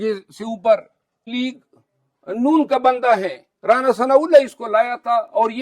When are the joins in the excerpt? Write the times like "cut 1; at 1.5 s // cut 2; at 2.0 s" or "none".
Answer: cut 1; at 1.2 s